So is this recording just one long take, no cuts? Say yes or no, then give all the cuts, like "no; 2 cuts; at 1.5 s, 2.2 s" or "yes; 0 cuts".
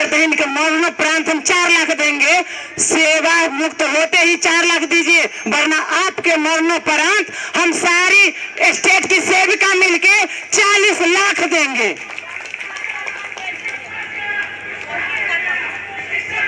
yes; 0 cuts